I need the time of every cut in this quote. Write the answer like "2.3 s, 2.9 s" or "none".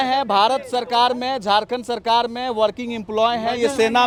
none